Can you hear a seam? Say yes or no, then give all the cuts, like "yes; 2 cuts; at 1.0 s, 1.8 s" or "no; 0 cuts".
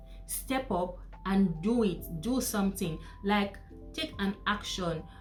no; 0 cuts